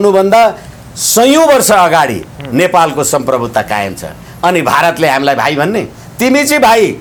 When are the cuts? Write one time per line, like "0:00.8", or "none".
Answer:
none

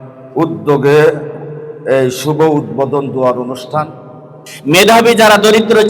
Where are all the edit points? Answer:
0:04.5

